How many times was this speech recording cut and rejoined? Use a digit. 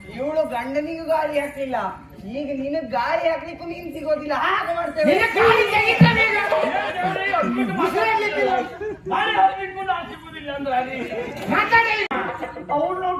1